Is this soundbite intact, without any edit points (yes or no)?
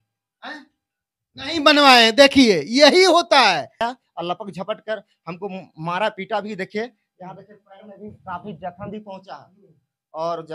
no